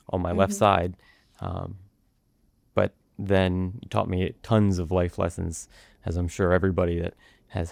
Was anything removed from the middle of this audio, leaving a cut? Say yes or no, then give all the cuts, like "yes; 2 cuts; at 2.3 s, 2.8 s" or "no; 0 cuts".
no; 0 cuts